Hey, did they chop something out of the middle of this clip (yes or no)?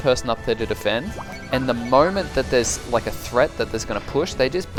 no